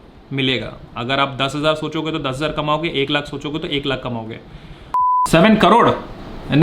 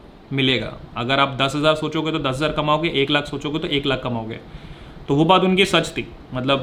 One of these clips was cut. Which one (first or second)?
first